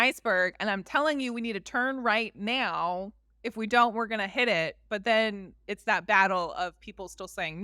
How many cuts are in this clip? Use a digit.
0